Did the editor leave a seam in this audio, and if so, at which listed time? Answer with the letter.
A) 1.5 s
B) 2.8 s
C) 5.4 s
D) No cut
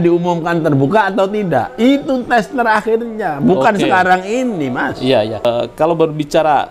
C